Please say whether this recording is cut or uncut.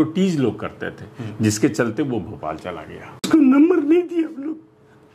cut